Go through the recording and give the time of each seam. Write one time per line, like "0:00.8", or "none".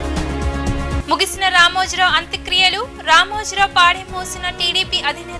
0:01.0